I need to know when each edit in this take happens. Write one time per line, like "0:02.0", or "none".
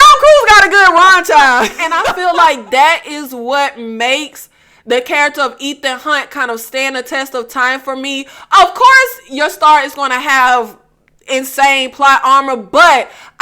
0:01.8